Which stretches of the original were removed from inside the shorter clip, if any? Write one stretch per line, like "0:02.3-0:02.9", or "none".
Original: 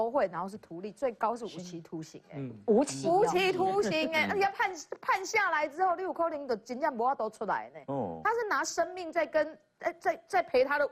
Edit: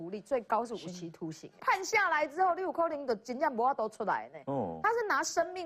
0:02.2-0:04.9